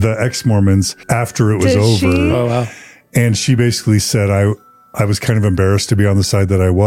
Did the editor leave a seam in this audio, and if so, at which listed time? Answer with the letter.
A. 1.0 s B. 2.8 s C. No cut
A